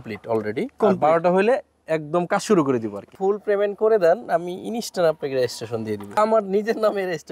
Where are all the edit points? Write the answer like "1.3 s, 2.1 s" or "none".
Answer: 3.0 s, 6.2 s